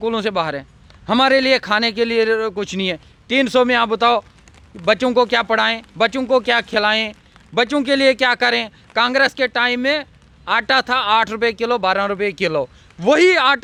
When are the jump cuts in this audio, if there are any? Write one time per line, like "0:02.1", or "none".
none